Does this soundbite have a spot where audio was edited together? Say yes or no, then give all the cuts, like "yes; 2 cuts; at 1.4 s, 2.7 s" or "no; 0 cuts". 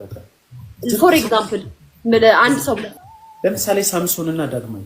yes; 1 cut; at 2.9 s